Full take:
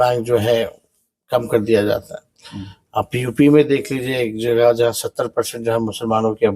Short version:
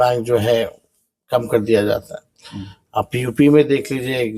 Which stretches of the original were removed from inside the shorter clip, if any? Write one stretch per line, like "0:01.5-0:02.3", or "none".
none